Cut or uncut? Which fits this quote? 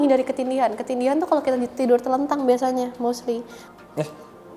cut